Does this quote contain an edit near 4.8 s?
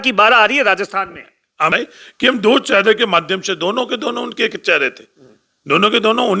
no; 1 cut; at 1.7 s

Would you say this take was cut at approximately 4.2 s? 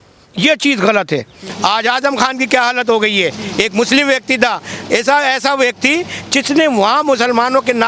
no; 1 cut; at 1.4 s

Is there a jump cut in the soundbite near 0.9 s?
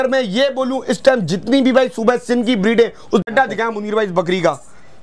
no; 1 cut; at 3.2 s

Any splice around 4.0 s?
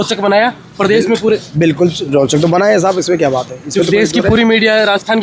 no; 0 cuts

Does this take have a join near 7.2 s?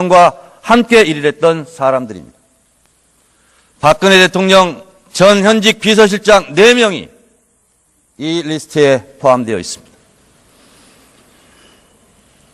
yes; 1 cut; at 7.2 s

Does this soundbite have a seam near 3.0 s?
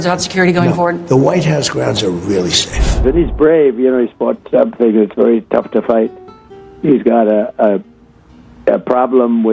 yes; 1 cut; at 3.0 s

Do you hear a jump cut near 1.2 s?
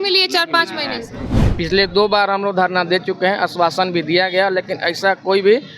yes; 1 cut; at 1.2 s

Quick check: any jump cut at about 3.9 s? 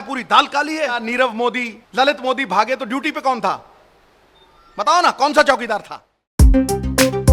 no; 3 cuts; at 1.0 s, 1.8 s, 6.2 s

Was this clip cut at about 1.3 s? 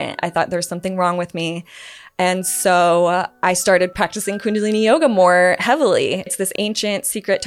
no; 2 cuts; at 3.9 s, 6.3 s

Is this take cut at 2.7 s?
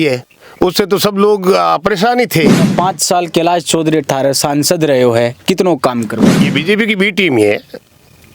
yes; 2 cuts; at 2.7 s, 6.4 s

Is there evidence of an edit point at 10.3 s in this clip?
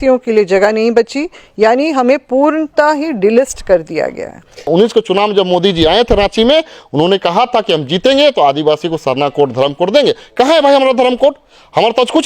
no; 1 cut; at 4.7 s

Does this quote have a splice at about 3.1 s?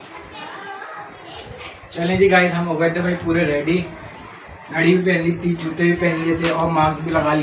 no; 0 cuts

